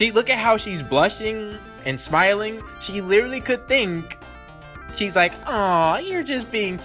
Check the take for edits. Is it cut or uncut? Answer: uncut